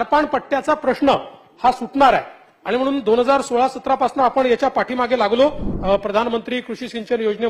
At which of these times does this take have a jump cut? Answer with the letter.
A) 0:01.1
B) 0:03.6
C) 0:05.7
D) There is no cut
C